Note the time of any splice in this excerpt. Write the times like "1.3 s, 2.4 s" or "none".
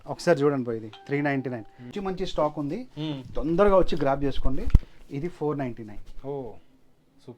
1.9 s